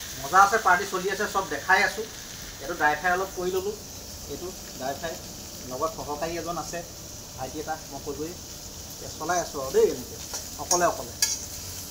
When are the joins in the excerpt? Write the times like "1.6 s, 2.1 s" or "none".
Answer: none